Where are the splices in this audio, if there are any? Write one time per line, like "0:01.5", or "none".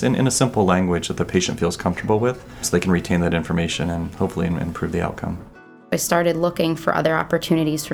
0:02.6
0:05.8